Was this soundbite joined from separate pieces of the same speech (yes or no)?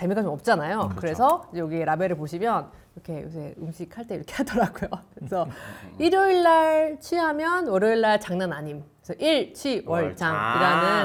no